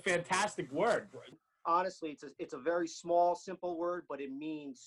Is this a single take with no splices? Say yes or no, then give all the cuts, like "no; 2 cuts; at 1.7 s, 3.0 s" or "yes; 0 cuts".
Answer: no; 1 cut; at 1.3 s